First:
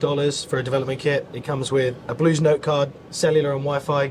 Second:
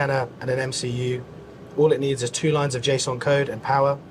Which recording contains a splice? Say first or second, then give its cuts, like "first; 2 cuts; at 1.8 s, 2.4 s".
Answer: first; 2 cuts; at 1.4 s, 3.0 s